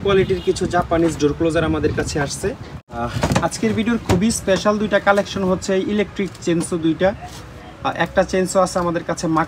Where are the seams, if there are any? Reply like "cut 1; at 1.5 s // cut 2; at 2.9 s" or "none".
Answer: cut 1; at 3.0 s

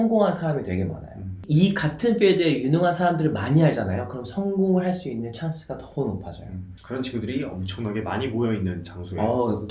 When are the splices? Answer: cut 1; at 6.7 s

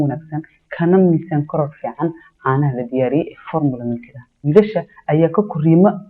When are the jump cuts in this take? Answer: cut 1; at 4.4 s

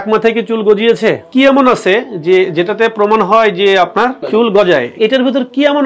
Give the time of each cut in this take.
cut 1; at 1.3 s // cut 2; at 4.2 s // cut 3; at 4.9 s

